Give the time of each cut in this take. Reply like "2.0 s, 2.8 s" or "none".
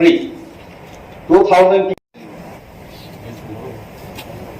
1.9 s